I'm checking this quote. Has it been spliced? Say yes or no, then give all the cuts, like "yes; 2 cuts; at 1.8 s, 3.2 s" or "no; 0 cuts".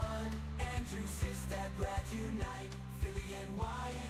no; 0 cuts